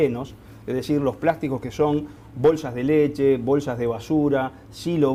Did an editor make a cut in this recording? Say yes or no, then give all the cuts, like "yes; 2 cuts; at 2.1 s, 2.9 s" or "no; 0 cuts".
no; 0 cuts